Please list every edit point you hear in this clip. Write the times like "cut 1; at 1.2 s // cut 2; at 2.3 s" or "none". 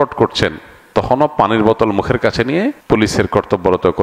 cut 1; at 2.8 s